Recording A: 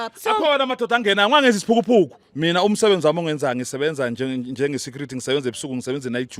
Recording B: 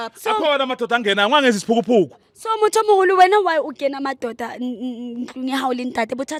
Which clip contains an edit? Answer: A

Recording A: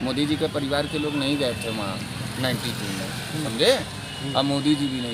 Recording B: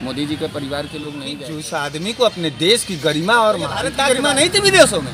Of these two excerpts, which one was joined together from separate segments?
B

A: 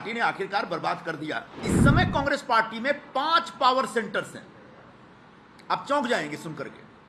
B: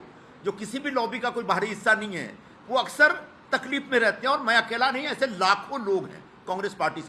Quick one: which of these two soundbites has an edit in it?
A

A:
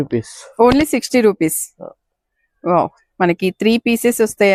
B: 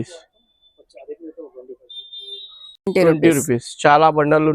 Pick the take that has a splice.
B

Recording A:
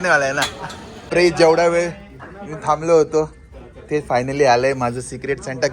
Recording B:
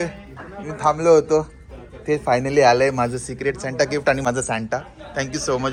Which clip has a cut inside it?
A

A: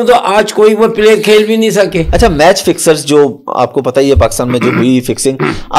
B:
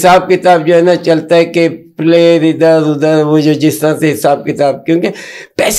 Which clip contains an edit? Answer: A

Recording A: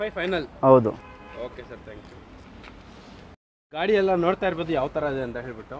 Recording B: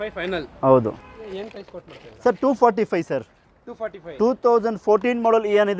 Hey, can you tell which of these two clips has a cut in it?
B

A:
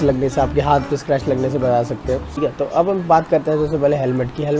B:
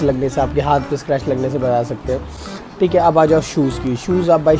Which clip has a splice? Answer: A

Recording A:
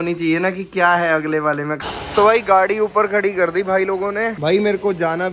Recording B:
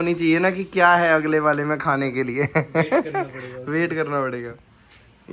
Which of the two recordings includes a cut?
A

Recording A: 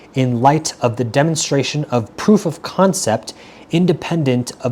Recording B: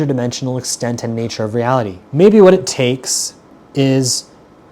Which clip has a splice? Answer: B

